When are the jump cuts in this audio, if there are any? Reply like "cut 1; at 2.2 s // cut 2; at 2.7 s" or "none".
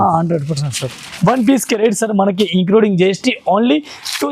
cut 1; at 1.0 s